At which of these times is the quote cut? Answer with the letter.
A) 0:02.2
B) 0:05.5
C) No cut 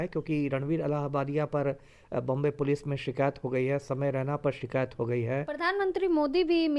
B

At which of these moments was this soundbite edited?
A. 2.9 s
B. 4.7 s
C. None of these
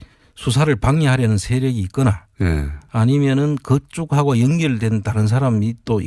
C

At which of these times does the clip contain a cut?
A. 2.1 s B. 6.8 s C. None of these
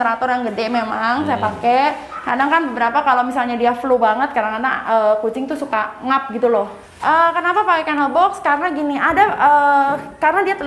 B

